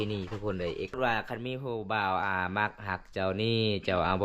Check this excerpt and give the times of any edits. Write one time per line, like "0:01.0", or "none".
0:00.9